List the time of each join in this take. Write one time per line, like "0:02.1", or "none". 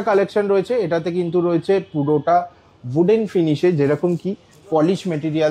none